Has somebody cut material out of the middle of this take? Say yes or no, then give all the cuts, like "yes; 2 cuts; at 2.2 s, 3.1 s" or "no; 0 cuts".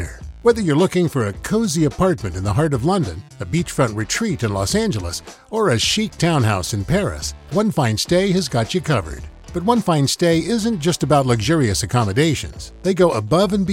no; 0 cuts